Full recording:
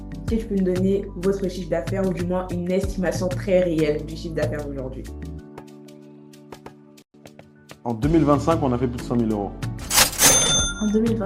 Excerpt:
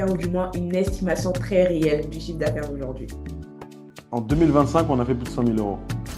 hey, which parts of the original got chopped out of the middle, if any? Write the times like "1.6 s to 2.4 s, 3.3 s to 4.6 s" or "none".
5.8 s to 7.6 s

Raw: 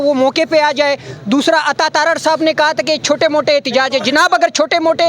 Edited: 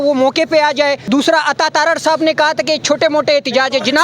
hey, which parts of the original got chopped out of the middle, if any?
1.0 s to 1.2 s

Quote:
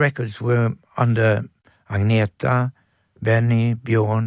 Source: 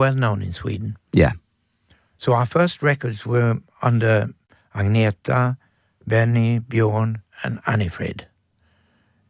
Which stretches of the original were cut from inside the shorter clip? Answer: none

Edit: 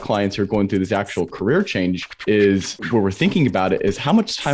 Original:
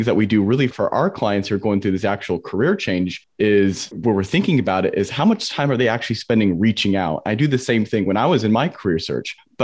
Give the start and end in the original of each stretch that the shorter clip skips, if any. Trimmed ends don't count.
none

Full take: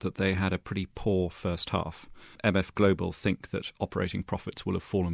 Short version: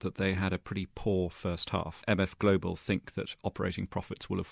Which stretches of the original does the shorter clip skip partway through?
1.9 s to 2.3 s

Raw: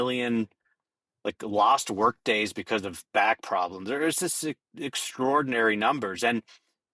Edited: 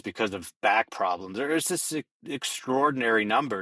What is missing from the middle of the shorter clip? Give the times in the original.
none

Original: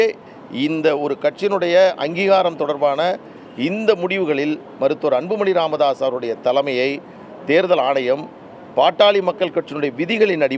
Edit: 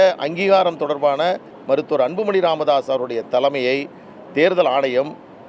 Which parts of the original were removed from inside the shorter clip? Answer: 3.3 s to 4.7 s

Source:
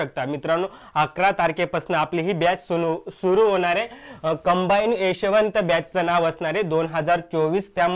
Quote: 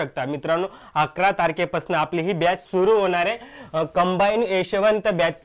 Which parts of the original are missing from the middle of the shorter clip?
2.6 s to 3.1 s

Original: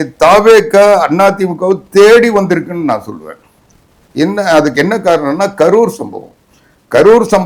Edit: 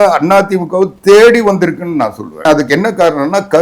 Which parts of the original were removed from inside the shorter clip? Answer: 3.3 s to 4.5 s

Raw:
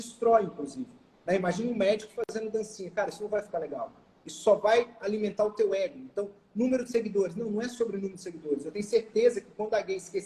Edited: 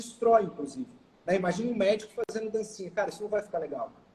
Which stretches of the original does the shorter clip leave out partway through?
none

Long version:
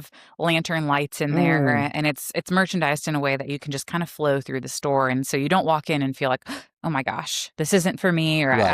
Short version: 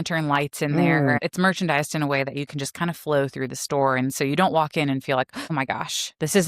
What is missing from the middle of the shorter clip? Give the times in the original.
1.8 s to 2.3 s, 6.5 s to 6.8 s

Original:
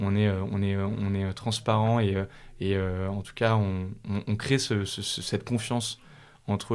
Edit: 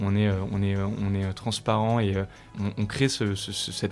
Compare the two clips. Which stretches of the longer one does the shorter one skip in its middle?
2.4 s to 3.9 s

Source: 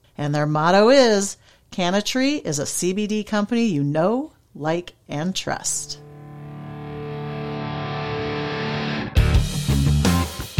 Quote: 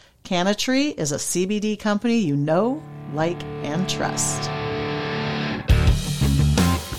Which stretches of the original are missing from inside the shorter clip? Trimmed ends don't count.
5.6 s to 7.6 s

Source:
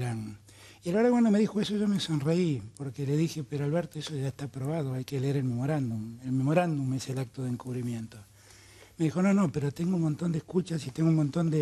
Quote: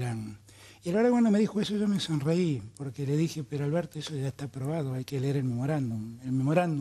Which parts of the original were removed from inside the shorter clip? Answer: none

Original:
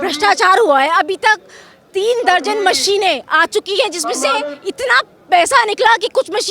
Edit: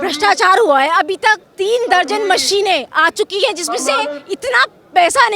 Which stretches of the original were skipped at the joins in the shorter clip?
1.5 s to 1.8 s

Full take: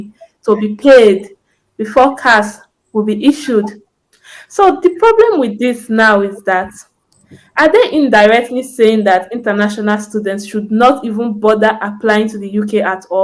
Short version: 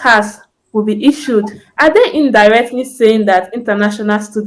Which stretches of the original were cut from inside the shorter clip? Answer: 3.8 s to 7.4 s

